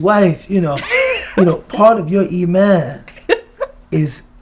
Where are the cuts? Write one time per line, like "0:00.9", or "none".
none